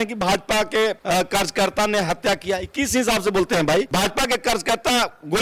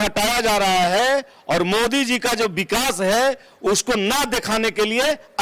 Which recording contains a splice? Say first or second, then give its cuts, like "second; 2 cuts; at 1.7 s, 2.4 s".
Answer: first; 1 cut; at 3.9 s